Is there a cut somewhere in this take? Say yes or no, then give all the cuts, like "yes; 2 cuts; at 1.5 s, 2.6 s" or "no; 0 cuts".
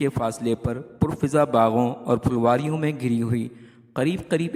no; 0 cuts